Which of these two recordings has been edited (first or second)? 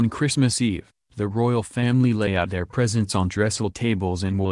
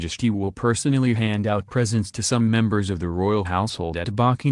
first